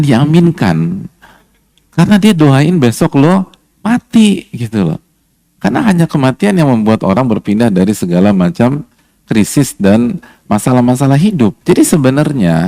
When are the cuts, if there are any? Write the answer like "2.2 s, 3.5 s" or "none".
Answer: 11.6 s